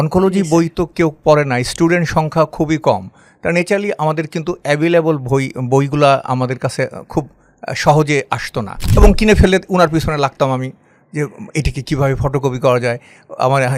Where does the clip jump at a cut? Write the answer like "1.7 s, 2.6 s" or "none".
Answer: 8.8 s